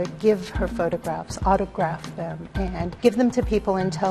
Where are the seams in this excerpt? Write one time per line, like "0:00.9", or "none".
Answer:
0:02.9